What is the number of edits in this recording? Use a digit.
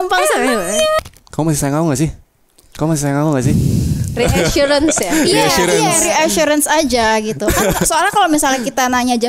1